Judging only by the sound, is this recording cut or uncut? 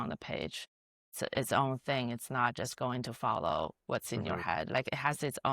cut